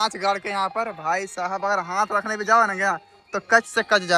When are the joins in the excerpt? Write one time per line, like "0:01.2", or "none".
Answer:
none